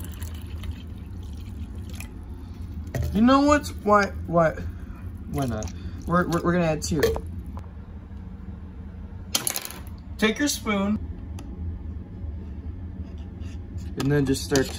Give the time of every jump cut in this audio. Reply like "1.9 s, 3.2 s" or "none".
none